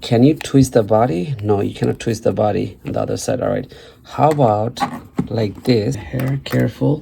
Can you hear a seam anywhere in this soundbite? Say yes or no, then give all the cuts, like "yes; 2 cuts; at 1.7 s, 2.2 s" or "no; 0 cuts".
yes; 1 cut; at 5.9 s